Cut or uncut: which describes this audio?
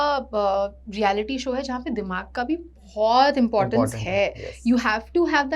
uncut